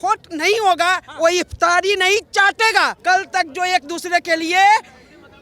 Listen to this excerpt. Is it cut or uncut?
cut